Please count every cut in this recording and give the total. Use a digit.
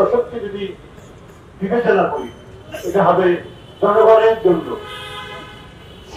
0